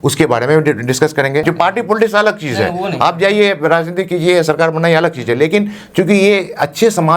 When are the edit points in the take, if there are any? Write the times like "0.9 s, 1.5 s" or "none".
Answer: 1.4 s